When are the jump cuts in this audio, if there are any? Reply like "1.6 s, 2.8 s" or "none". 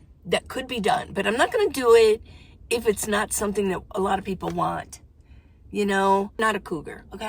6.4 s